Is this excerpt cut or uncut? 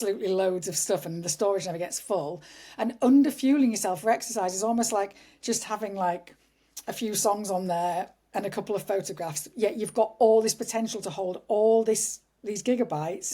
uncut